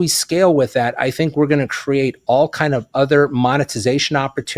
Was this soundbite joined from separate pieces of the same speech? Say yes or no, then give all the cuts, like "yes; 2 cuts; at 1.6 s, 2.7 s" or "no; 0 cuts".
no; 0 cuts